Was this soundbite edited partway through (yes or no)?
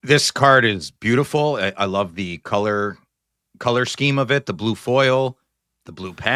no